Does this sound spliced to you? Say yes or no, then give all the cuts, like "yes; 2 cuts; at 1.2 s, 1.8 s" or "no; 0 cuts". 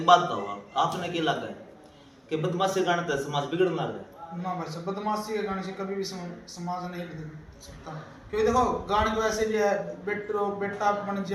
no; 0 cuts